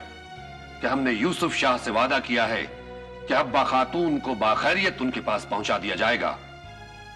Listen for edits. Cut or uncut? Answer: uncut